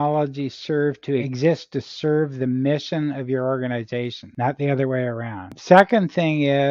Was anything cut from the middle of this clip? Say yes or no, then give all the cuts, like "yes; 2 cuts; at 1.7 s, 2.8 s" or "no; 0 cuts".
yes; 3 cuts; at 1.3 s, 4.2 s, 5.6 s